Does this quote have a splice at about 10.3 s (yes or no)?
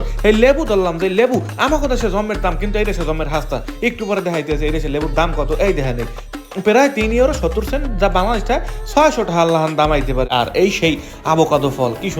yes